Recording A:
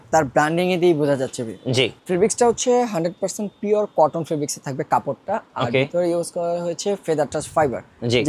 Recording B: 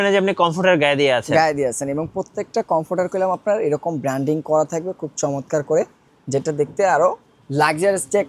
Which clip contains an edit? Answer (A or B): A